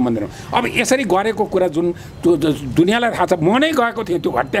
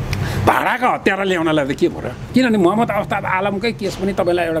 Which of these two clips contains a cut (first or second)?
second